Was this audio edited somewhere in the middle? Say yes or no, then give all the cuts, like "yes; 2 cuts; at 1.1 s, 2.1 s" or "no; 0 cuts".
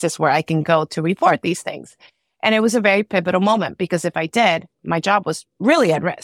no; 0 cuts